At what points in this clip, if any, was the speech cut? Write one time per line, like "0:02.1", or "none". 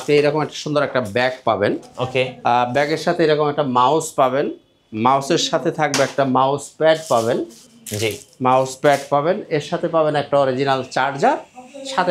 none